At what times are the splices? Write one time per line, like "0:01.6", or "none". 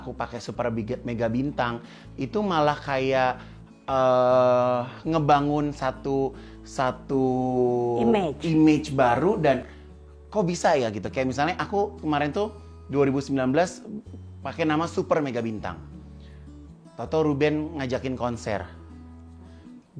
none